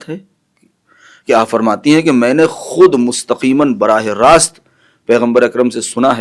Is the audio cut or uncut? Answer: uncut